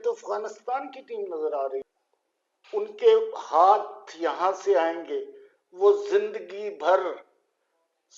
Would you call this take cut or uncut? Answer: cut